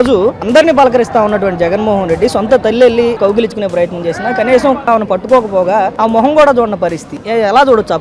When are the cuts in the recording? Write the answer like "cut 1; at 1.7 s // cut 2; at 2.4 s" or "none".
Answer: cut 1; at 3.2 s // cut 2; at 4.8 s // cut 3; at 5.9 s // cut 4; at 7.2 s